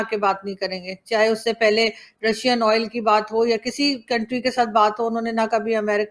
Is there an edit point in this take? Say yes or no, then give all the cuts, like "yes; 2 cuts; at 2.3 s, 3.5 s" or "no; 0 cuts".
no; 0 cuts